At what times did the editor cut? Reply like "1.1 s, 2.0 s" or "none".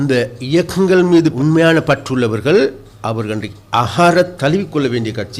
1.3 s, 2.9 s